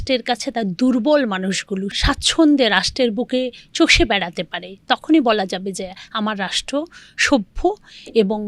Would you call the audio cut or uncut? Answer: cut